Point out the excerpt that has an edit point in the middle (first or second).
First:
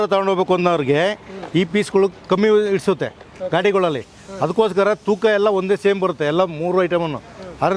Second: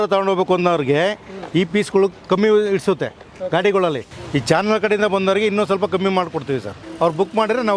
second